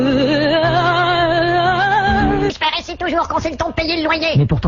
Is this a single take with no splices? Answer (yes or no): yes